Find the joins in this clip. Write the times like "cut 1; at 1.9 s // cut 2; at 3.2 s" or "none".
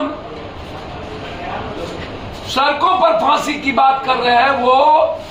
none